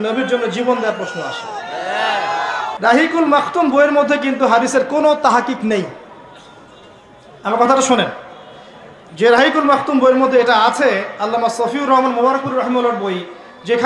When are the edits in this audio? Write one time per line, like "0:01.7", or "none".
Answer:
0:02.6